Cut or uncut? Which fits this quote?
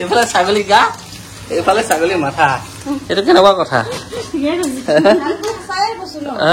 uncut